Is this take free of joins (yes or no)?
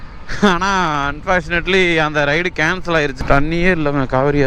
no